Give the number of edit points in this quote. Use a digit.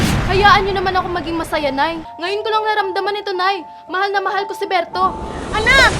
1